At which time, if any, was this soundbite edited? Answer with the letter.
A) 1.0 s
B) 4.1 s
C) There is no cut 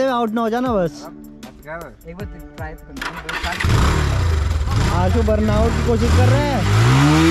C